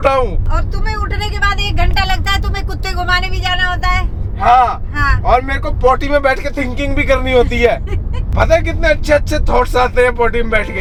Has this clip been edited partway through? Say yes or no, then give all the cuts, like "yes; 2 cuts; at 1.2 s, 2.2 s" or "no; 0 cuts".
no; 0 cuts